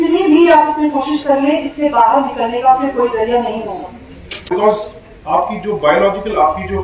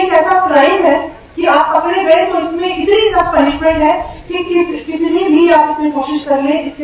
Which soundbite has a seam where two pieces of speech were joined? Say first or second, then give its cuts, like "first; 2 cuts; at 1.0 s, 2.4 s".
first; 1 cut; at 4.6 s